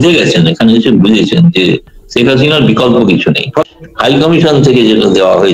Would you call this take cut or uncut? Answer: cut